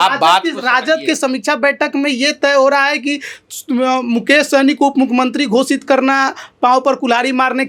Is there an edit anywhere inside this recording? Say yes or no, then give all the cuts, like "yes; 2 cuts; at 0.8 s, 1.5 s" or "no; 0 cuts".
no; 0 cuts